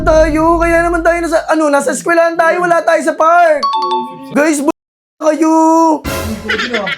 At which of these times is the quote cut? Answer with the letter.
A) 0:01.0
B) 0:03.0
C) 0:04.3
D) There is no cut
C